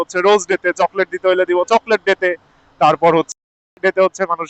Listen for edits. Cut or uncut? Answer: cut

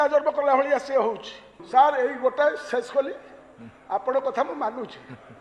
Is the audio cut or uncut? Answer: cut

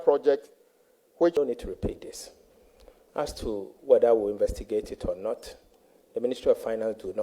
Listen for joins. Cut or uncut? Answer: cut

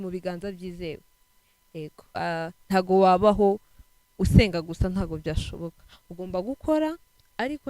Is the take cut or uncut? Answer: cut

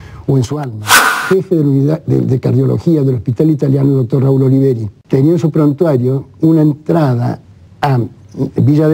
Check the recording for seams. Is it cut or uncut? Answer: cut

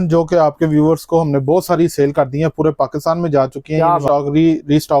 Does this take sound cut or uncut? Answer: cut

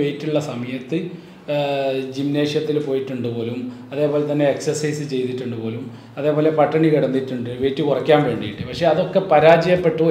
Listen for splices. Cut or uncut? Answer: uncut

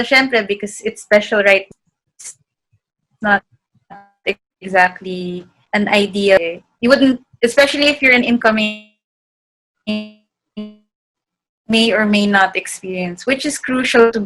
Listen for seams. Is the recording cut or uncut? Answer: cut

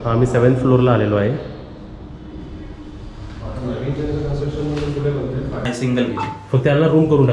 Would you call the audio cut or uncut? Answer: cut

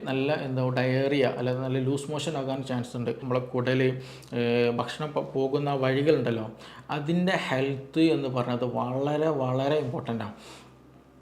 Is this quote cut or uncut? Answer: cut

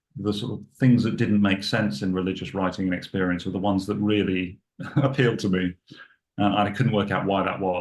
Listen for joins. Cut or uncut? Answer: uncut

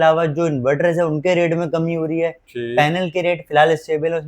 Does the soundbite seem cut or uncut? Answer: uncut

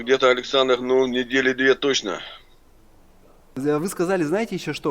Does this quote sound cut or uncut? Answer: cut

